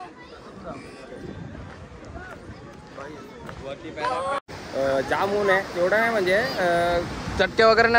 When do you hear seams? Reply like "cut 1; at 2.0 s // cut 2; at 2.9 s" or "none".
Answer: cut 1; at 4.4 s